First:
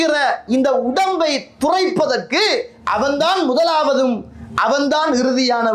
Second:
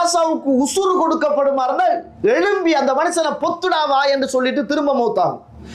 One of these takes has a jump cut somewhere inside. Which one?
first; 1 cut; at 2.8 s

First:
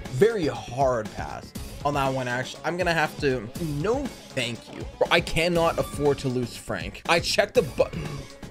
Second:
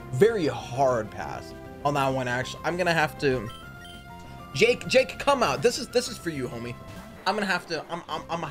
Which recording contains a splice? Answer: first; 3 cuts; at 3.5 s, 4.9 s, 6.9 s

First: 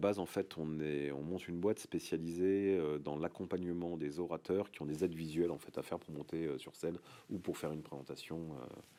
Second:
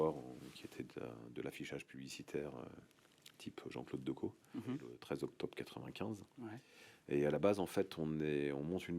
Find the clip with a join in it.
second; 1 cut; at 4.9 s

